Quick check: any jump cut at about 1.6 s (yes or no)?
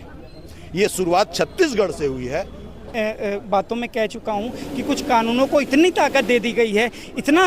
no